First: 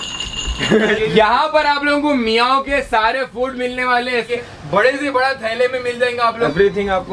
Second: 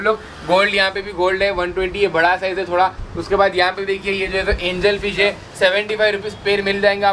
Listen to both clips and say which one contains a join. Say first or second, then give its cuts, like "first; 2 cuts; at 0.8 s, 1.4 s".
first; 3 cuts; at 1.0 s, 4.3 s, 6.3 s